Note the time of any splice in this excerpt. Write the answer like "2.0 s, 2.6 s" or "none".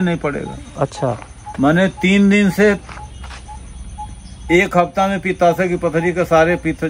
none